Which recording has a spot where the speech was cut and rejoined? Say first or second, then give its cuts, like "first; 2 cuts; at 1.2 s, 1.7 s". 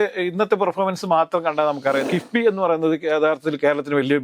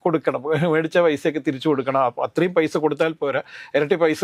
first; 1 cut; at 2.1 s